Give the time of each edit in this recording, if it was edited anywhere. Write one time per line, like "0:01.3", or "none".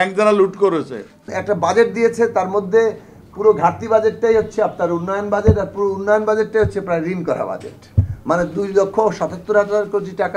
0:01.3